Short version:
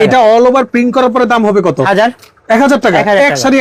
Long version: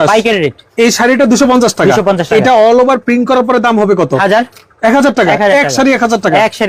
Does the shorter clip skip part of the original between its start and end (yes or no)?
no